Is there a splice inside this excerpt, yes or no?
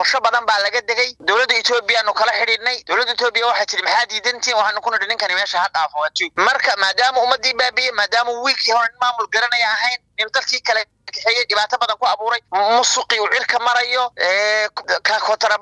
yes